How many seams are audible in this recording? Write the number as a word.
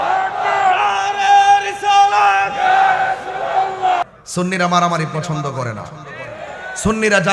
one